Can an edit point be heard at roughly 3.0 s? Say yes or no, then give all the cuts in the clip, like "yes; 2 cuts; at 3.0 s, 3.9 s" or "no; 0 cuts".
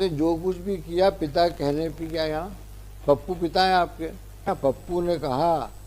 no; 0 cuts